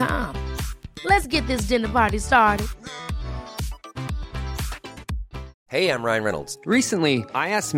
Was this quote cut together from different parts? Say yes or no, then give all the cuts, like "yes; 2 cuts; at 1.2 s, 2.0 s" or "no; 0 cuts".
yes; 1 cut; at 5.6 s